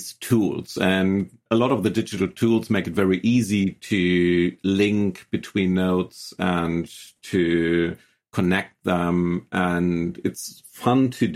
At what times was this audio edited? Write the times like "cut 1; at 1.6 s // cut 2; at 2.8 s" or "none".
cut 1; at 1.5 s